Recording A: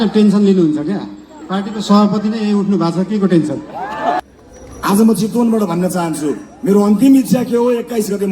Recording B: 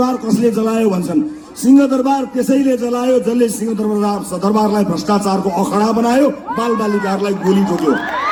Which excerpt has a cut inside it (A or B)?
A